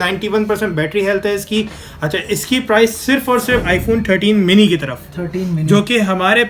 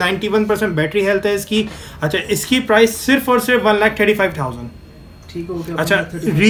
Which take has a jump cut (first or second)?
first